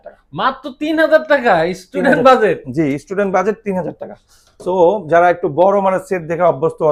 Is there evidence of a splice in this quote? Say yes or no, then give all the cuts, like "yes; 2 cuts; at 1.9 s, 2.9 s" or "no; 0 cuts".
no; 0 cuts